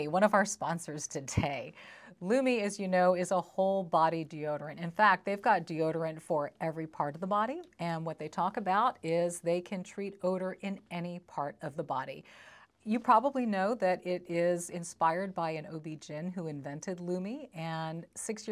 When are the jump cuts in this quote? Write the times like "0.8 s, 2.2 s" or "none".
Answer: none